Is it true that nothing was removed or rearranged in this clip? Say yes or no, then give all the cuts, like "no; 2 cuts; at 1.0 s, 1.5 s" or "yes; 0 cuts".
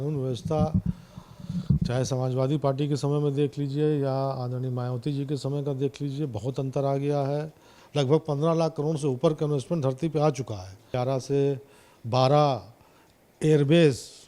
no; 2 cuts; at 7.8 s, 10.9 s